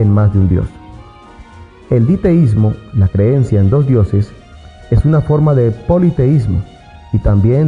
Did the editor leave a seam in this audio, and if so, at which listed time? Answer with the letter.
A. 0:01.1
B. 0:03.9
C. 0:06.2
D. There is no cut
B